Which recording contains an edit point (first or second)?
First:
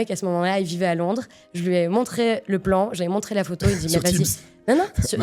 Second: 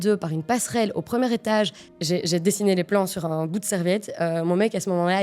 second